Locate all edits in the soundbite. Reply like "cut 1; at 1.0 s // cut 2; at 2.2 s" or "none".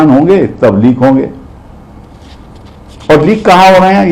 none